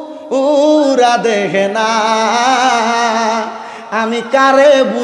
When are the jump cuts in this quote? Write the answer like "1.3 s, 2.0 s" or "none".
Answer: none